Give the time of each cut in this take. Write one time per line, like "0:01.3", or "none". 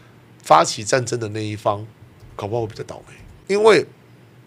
0:03.3

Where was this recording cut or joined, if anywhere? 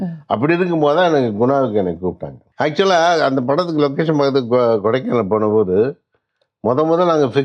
0:02.4

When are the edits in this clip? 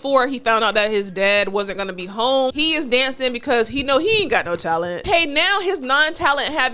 0:02.5
0:05.0

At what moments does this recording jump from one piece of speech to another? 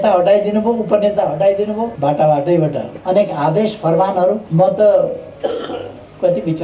0:01.9
0:02.9
0:04.4
0:05.3

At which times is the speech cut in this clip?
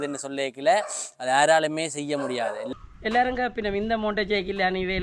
0:02.7

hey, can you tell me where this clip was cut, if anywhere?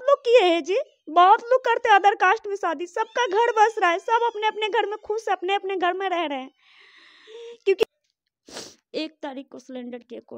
0:07.8

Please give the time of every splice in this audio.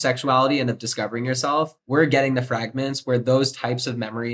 0:01.7

